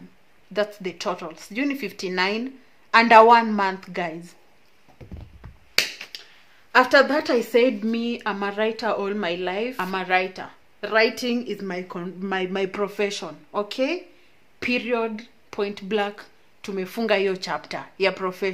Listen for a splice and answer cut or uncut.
uncut